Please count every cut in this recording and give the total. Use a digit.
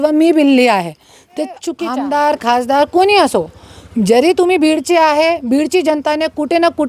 1